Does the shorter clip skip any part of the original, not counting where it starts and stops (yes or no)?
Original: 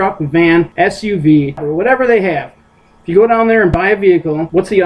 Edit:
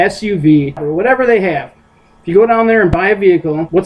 no